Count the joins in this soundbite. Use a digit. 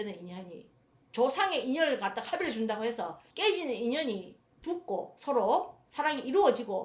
1